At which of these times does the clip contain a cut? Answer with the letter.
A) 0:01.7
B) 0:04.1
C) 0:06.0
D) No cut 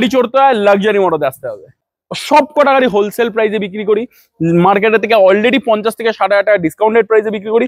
A